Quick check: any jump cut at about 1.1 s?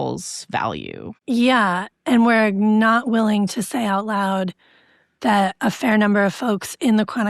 yes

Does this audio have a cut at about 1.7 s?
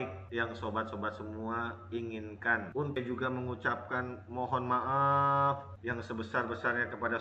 no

